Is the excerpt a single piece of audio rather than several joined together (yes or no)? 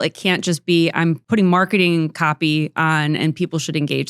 no